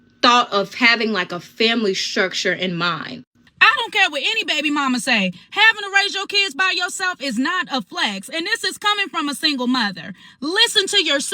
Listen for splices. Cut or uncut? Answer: cut